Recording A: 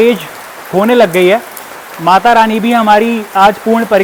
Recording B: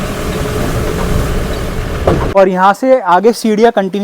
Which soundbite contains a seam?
B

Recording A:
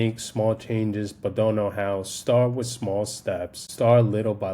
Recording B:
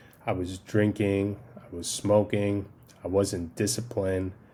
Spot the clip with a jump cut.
A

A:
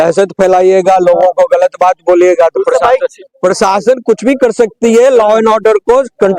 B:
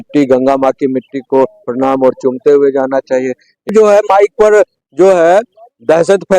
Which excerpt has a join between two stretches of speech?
B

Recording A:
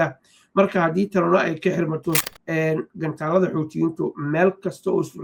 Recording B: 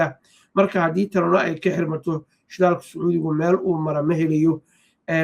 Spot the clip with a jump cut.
A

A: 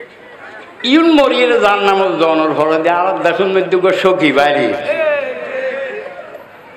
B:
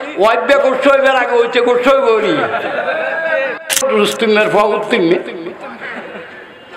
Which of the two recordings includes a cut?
B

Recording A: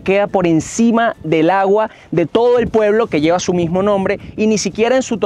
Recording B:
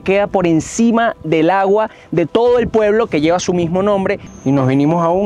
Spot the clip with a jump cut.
B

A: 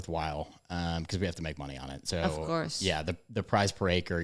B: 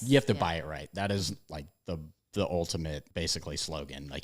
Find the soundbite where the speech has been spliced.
B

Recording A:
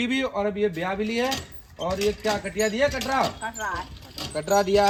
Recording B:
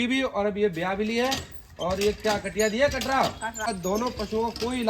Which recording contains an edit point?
B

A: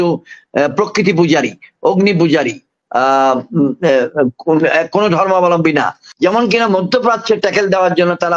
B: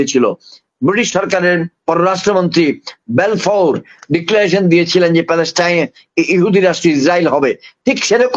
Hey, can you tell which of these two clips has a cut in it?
A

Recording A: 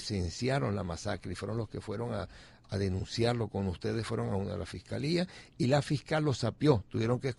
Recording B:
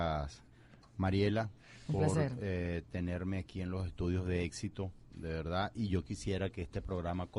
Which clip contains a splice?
B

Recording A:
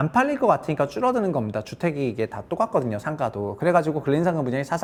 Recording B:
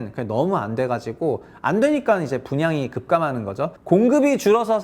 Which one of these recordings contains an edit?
B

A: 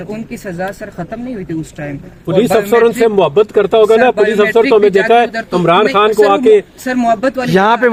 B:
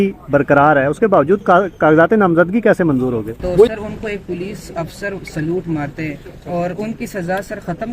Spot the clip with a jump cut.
B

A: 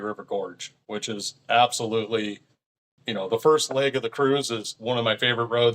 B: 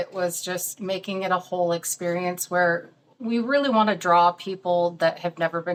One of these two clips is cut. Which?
A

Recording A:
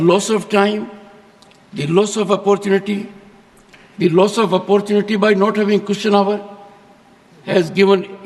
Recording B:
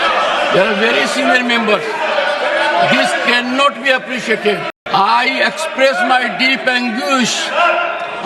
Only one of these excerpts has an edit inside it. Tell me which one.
B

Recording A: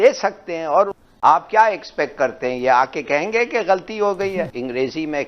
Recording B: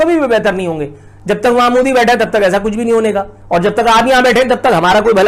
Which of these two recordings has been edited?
A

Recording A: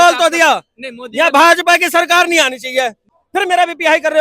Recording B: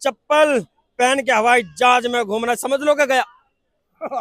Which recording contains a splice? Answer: A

